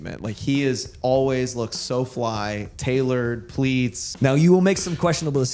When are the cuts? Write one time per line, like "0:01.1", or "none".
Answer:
0:04.0